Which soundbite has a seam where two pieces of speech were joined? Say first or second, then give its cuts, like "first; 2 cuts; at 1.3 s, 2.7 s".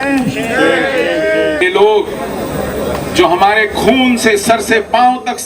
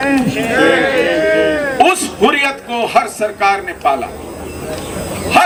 first; 1 cut; at 1.6 s